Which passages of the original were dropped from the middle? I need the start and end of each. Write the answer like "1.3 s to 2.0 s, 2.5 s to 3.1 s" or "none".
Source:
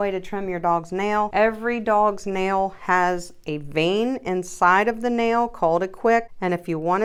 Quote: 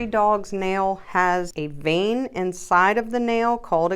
3.3 s to 3.5 s